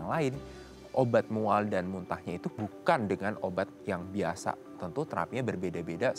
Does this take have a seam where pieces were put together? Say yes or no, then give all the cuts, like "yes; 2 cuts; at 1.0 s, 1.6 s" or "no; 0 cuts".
no; 0 cuts